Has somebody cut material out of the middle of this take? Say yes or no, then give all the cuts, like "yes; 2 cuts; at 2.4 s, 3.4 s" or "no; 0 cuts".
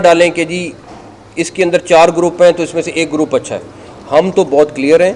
no; 0 cuts